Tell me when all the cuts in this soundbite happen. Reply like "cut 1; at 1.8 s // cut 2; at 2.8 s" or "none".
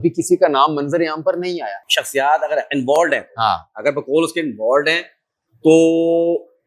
cut 1; at 1.8 s